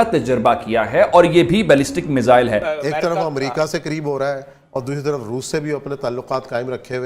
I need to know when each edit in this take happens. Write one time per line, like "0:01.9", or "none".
0:02.6